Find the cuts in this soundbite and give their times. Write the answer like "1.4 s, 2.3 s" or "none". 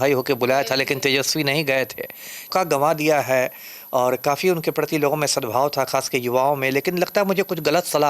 2.5 s